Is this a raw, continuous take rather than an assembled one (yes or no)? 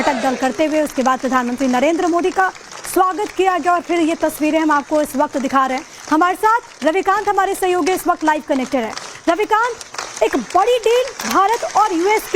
no